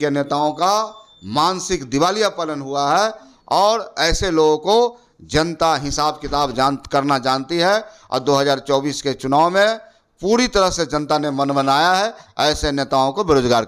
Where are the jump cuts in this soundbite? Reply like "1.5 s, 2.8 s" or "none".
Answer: none